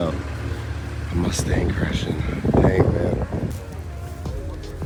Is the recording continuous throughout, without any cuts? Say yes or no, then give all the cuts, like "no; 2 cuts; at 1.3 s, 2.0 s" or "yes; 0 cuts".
yes; 0 cuts